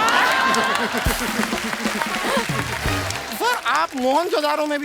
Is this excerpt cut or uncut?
cut